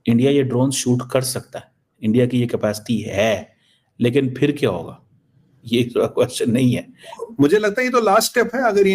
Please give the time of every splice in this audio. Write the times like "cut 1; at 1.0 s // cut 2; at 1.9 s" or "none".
cut 1; at 7.2 s

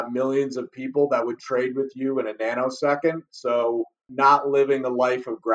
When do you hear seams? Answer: cut 1; at 4.1 s

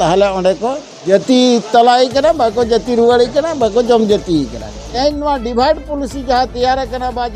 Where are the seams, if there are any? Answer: cut 1; at 0.9 s // cut 2; at 4.9 s

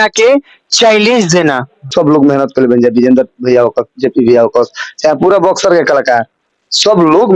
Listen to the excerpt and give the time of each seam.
cut 1; at 1.9 s

